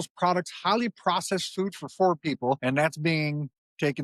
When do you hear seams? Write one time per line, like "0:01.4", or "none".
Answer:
0:02.6